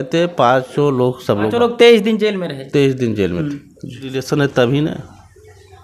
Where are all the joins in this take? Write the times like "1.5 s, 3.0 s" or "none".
1.5 s, 4.2 s